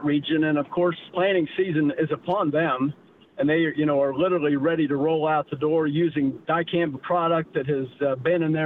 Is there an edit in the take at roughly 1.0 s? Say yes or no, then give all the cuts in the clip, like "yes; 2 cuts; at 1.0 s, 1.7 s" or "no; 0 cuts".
yes; 2 cuts; at 1.0 s, 6.4 s